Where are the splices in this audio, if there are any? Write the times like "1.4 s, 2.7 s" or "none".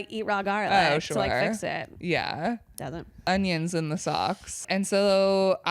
3.2 s, 4.6 s